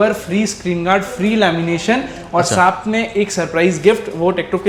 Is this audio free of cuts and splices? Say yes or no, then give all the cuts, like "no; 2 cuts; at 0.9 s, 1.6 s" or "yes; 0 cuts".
yes; 0 cuts